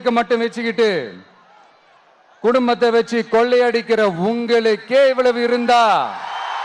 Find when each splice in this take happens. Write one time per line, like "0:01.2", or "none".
none

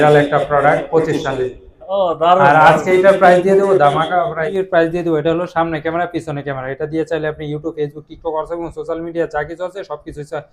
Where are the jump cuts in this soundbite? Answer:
0:04.4

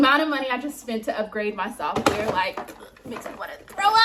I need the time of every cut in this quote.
none

